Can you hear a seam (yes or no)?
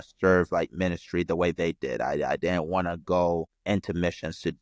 yes